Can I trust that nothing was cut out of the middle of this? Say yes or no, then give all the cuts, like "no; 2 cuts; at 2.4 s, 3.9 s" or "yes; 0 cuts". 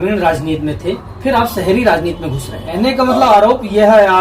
no; 1 cut; at 2.6 s